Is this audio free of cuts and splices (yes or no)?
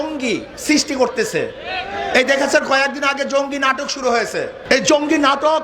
no